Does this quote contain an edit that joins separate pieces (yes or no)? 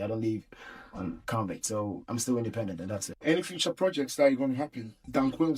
no